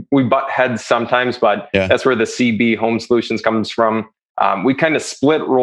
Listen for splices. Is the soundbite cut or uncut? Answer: cut